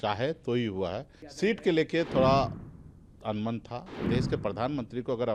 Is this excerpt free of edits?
no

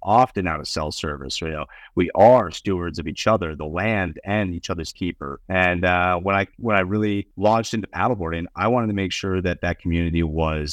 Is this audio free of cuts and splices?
no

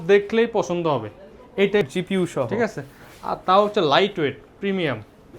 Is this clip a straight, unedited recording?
no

